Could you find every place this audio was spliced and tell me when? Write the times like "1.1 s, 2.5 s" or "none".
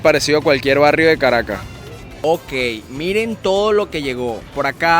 2.2 s